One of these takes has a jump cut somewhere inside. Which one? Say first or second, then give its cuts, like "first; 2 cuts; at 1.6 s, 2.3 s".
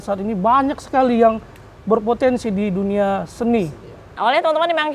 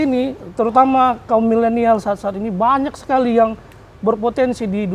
first; 1 cut; at 4.0 s